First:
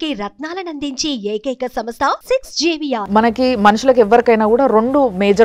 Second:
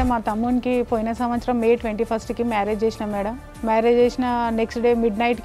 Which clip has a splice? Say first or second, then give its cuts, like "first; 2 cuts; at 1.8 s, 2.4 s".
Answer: first; 1 cut; at 3.0 s